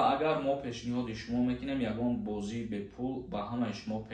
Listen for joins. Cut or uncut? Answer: uncut